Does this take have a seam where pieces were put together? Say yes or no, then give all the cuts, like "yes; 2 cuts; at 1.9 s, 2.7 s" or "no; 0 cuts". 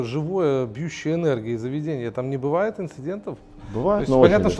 no; 0 cuts